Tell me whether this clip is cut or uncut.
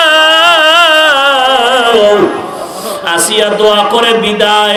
uncut